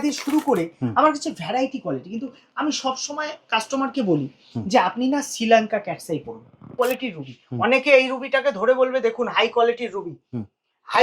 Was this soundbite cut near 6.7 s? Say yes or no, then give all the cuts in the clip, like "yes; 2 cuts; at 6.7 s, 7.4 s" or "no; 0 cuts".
yes; 1 cut; at 6.7 s